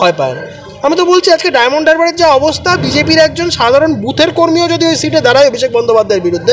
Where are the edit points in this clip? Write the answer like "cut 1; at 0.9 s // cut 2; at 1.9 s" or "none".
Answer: none